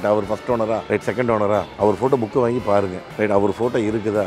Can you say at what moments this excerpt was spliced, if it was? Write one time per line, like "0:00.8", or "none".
0:00.8
0:01.7
0:03.0